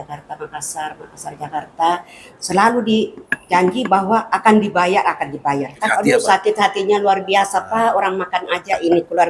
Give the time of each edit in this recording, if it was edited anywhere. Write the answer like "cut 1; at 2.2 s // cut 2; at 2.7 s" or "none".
cut 1; at 2.4 s // cut 2; at 6.1 s